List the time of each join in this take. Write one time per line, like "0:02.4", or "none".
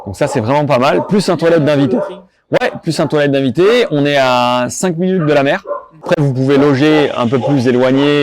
0:06.1